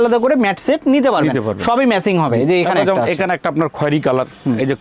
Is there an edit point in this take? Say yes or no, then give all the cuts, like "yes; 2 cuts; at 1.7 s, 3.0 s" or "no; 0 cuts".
no; 0 cuts